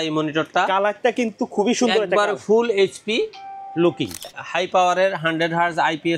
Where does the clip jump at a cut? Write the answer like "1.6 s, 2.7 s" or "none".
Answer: 4.4 s

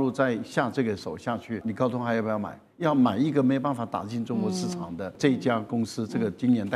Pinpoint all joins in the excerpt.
1.6 s, 5.1 s

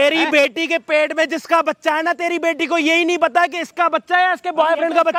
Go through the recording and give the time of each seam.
none

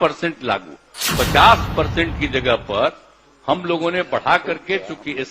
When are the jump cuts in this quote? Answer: 1.1 s

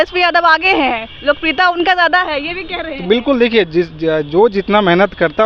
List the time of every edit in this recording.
none

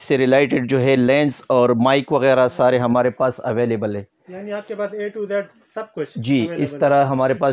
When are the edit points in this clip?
none

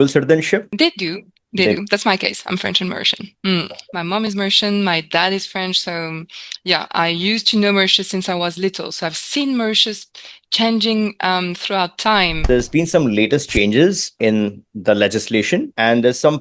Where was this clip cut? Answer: 3.8 s, 12.4 s

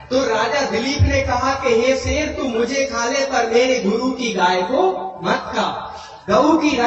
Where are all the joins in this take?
none

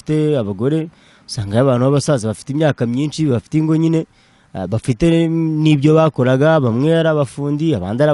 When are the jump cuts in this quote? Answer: none

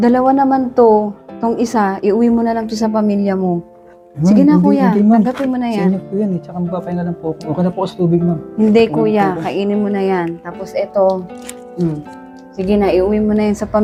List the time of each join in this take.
none

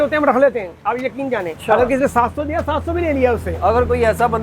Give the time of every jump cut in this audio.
1.5 s

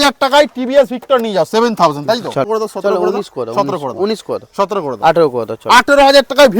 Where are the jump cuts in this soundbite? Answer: 2.5 s

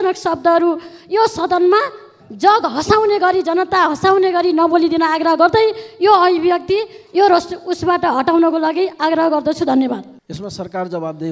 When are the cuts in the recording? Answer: 10.2 s

